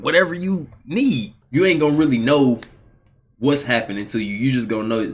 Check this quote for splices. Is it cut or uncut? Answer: cut